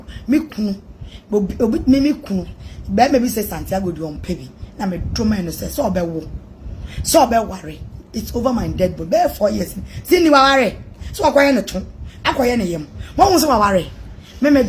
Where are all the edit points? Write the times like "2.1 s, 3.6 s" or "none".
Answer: none